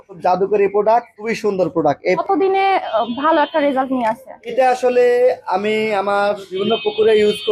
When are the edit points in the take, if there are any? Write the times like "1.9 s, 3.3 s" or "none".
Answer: 2.2 s